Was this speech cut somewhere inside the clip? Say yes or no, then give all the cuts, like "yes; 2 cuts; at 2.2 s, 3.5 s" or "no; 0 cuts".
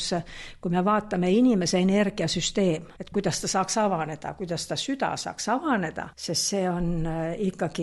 yes; 2 cuts; at 2.9 s, 6.1 s